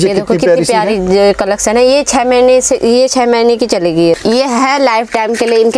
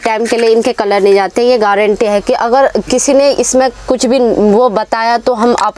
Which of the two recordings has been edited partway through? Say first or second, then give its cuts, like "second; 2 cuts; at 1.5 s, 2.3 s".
first; 1 cut; at 4.1 s